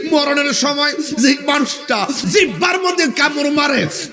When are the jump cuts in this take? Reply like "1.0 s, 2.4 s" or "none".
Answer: 2.2 s